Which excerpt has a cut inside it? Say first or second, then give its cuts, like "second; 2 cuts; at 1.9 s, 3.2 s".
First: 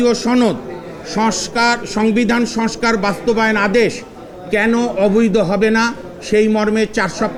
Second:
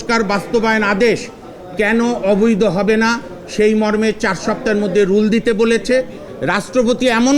second; 1 cut; at 6.3 s